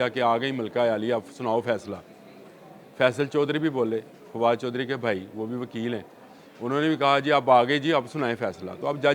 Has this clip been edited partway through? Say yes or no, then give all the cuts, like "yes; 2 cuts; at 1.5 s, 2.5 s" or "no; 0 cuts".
no; 0 cuts